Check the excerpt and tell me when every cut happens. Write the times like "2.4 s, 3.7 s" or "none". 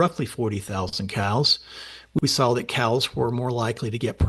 2.2 s